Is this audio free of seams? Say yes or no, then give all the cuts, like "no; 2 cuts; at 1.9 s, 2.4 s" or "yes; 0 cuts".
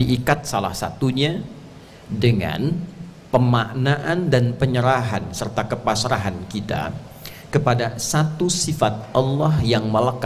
yes; 0 cuts